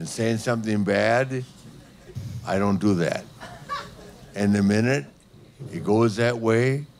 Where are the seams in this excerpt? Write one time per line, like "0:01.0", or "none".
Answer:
none